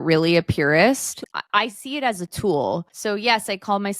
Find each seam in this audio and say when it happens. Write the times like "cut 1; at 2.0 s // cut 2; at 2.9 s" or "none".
cut 1; at 1.2 s // cut 2; at 2.9 s